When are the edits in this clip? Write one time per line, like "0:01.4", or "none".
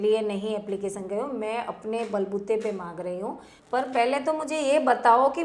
0:03.5

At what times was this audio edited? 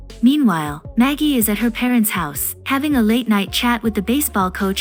none

